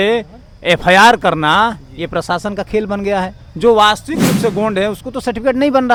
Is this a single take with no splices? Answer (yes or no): yes